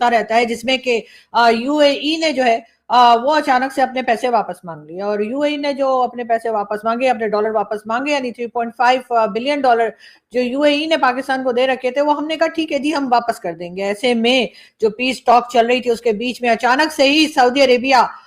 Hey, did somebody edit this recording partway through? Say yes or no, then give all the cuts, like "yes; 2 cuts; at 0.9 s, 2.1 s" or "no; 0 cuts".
no; 0 cuts